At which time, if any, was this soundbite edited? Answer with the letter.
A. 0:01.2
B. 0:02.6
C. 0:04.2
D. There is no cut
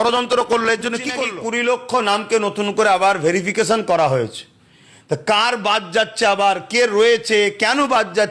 A